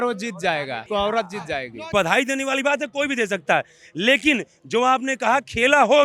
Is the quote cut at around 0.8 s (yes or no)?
yes